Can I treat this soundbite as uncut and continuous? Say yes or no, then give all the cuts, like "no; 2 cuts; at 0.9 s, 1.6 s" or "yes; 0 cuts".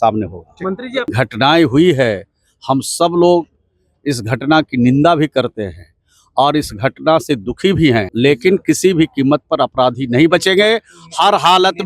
no; 2 cuts; at 1.1 s, 8.1 s